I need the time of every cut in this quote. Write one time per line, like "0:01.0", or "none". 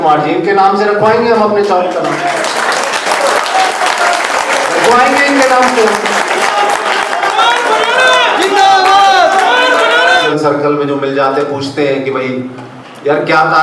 0:10.3